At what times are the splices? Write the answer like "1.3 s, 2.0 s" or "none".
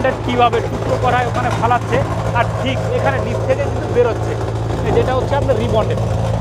none